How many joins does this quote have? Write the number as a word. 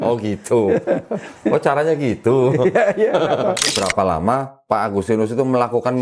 one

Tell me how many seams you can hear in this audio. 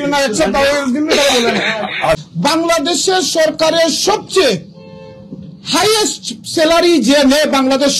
one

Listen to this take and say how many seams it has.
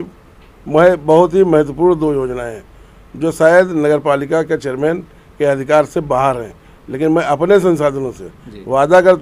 zero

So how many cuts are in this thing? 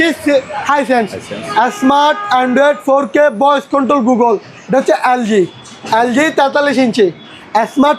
one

